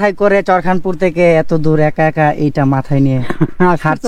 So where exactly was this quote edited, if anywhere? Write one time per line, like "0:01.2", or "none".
none

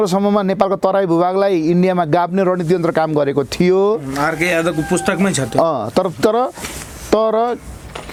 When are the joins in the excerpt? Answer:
none

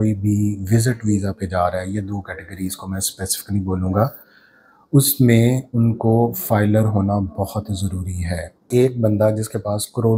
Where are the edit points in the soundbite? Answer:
0:08.7

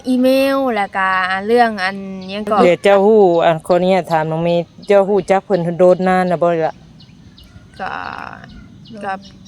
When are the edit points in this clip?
0:02.6

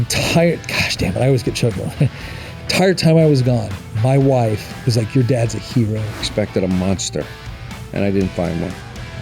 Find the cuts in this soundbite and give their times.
0:06.3

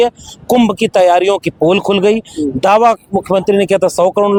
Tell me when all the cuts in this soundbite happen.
none

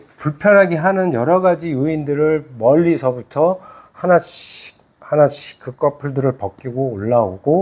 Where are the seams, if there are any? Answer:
none

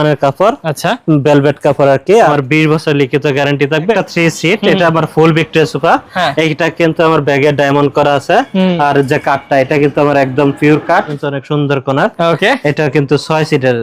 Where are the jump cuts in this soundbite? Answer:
0:02.3
0:03.9
0:11.1

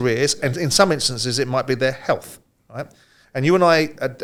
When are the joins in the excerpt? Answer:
none

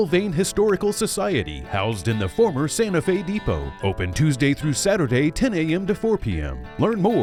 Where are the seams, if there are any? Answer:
none

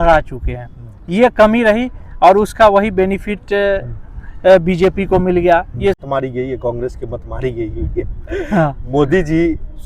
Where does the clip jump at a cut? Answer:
0:06.0

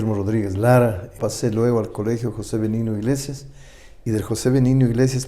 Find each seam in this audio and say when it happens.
0:01.2

